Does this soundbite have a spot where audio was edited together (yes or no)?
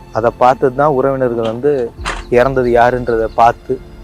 no